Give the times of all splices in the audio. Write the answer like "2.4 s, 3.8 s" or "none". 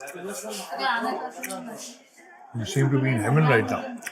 none